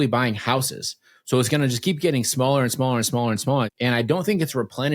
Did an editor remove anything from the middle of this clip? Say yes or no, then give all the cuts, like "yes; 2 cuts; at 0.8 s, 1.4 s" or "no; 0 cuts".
yes; 1 cut; at 3.7 s